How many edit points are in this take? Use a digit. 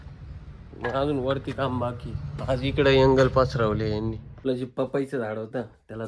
1